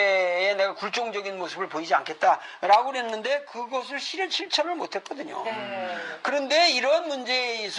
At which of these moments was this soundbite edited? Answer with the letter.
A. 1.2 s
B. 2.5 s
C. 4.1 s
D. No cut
B